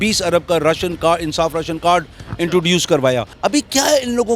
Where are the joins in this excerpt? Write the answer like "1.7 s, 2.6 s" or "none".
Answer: 3.3 s